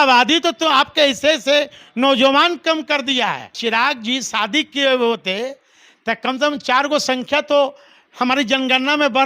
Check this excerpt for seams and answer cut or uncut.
cut